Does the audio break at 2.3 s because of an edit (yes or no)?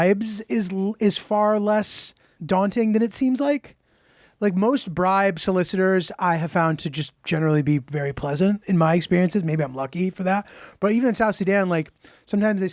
yes